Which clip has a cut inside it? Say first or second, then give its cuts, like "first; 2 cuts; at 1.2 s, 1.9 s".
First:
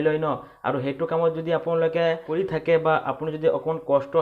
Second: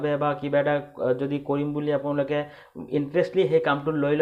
first; 1 cut; at 2.3 s